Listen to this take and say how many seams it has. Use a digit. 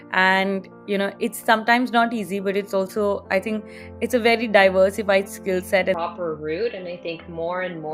1